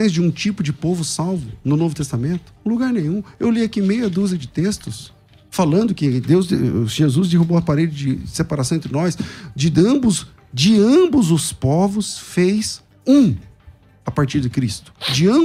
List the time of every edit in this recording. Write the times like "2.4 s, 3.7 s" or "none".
none